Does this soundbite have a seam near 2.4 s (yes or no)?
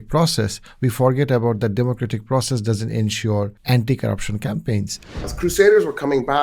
no